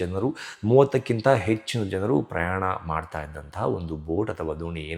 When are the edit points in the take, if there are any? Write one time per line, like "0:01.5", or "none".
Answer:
none